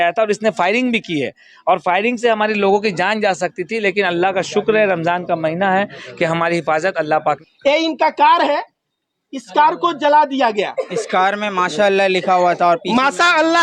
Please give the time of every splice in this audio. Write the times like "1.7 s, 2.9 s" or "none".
7.4 s